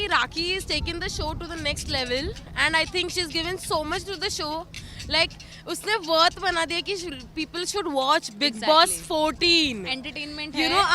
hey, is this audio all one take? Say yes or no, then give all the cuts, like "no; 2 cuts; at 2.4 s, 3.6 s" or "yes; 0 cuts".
yes; 0 cuts